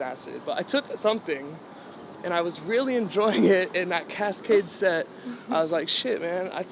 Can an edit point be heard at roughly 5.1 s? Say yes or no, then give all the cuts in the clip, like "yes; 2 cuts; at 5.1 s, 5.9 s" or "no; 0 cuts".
no; 0 cuts